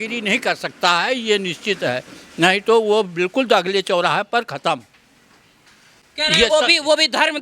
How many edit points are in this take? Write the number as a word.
zero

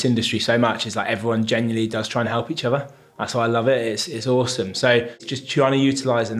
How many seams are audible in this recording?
one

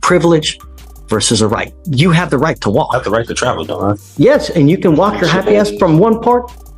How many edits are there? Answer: one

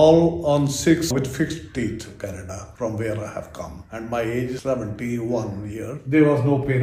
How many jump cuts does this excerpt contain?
three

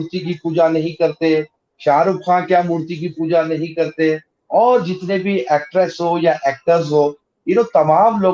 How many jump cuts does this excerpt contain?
zero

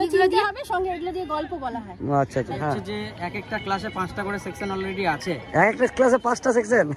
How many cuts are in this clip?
one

